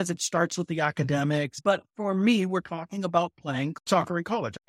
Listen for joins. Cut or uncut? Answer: cut